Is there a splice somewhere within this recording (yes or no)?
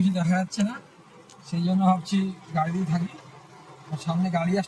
no